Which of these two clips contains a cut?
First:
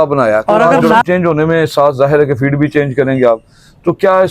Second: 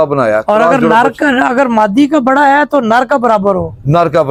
first; 1 cut; at 1.0 s

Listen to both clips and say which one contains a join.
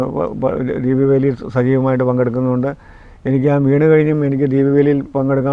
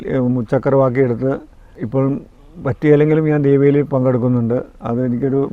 second; 1 cut; at 1.7 s

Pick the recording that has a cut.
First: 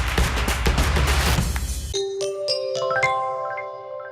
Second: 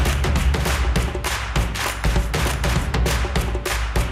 first; 1 cut; at 1.7 s

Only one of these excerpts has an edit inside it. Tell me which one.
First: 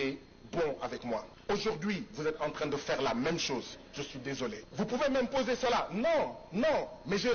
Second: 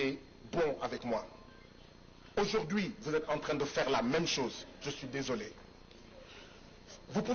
first; 2 cuts; at 1.3 s, 4.7 s

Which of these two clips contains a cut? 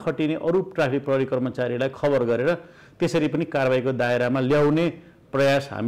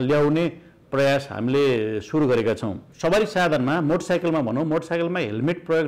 second; 1 cut; at 2.9 s

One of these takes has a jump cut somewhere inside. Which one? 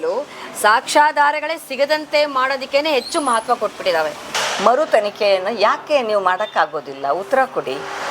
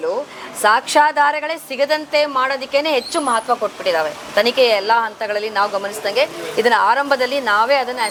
first; 1 cut; at 4.3 s

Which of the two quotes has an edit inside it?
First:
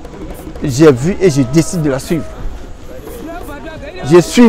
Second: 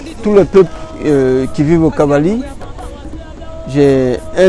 second; 1 cut; at 0.9 s

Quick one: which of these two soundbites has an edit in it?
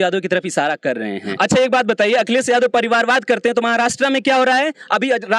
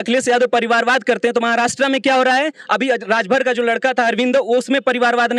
first; 1 cut; at 1.3 s

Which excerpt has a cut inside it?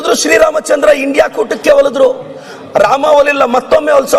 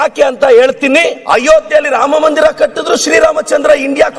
second; 1 cut; at 1.2 s

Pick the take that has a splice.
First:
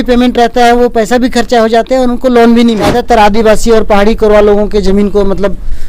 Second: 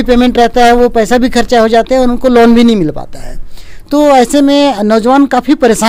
first; 1 cut; at 2.9 s

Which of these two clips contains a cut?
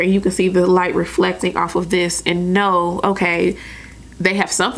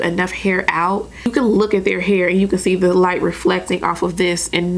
second; 1 cut; at 1.3 s

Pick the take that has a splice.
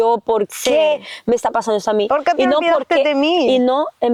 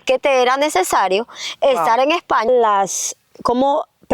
second; 1 cut; at 2.5 s

